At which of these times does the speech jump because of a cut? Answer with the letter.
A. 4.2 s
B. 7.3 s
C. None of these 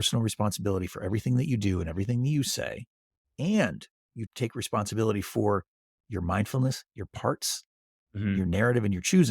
A